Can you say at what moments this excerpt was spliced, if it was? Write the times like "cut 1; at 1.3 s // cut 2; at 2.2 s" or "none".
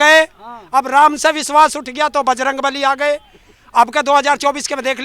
none